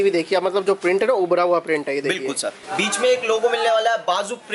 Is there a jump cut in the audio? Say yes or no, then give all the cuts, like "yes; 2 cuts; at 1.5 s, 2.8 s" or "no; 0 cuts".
yes; 1 cut; at 2.6 s